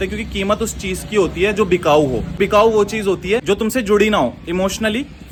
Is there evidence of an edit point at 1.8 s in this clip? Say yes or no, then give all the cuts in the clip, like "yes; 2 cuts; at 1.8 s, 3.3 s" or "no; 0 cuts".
no; 0 cuts